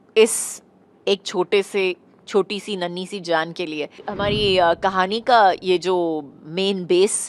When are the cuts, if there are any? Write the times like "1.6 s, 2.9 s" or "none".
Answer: 4.0 s